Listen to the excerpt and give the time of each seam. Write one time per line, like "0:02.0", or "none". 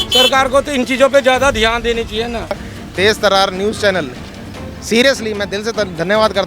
0:02.7

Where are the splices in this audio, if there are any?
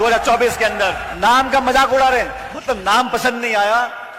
0:01.1
0:02.5

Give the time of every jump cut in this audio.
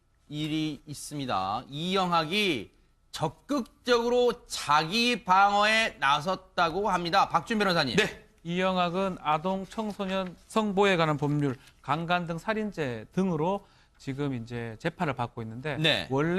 none

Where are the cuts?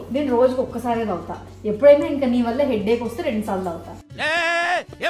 none

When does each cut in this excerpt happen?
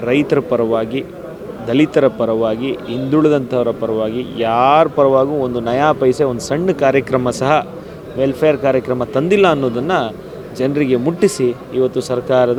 none

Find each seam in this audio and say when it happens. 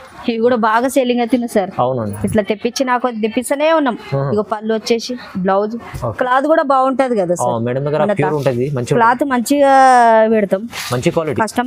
none

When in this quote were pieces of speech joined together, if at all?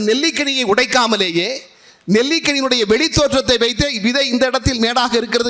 none

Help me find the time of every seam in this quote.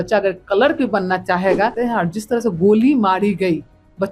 0:01.7

